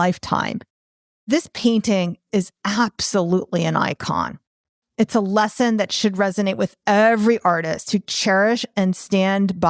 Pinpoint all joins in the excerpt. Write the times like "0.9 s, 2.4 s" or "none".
1.1 s